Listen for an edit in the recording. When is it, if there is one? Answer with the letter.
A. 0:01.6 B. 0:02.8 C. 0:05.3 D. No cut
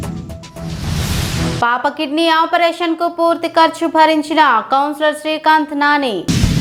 D